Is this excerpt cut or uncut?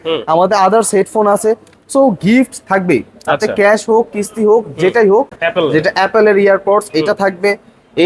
cut